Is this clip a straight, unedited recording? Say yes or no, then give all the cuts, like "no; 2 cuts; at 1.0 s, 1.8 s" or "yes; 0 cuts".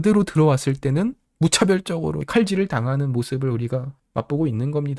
no; 3 cuts; at 1.2 s, 2.2 s, 4.0 s